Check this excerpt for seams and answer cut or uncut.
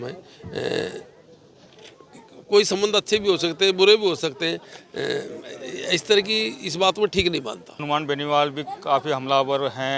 cut